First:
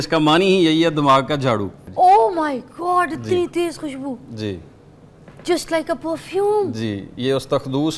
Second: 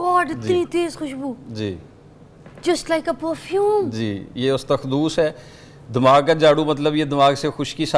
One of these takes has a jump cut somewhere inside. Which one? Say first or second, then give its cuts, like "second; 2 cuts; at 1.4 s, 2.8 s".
first; 1 cut; at 1.8 s